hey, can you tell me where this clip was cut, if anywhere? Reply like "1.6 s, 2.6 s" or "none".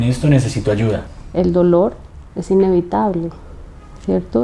1.1 s